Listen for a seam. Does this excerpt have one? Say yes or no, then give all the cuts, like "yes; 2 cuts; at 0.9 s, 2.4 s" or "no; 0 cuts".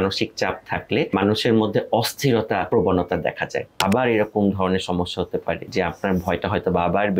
yes; 4 cuts; at 1.1 s, 2.7 s, 3.8 s, 5.6 s